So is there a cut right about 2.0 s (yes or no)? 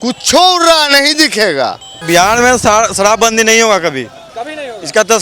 yes